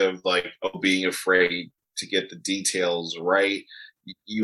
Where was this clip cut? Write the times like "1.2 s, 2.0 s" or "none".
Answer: none